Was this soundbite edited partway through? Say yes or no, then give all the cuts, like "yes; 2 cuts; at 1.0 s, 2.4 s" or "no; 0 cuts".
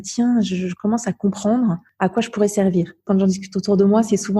yes; 2 cuts; at 1.9 s, 3.0 s